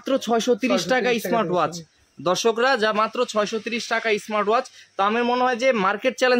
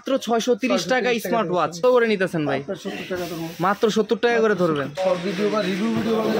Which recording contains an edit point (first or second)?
second